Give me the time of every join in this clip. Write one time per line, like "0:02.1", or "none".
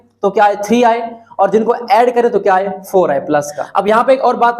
0:03.6